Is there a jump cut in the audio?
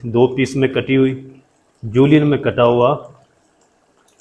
no; 0 cuts

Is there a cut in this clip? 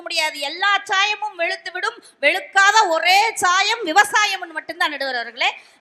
no; 0 cuts

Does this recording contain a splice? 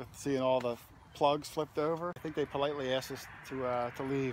no; 0 cuts

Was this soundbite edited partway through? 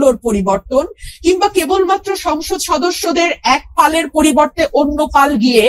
no; 0 cuts

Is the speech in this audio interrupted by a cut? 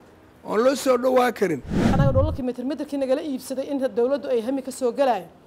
yes; 1 cut; at 1.9 s

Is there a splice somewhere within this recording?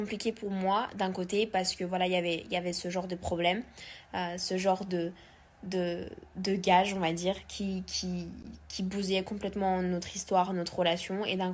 no; 0 cuts

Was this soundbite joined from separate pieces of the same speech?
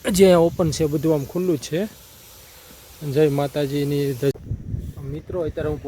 yes; 1 cut; at 4.3 s

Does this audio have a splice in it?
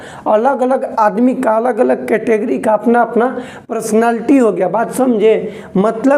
no; 0 cuts

